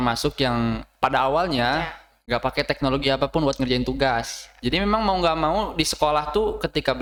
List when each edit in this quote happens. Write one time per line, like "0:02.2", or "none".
none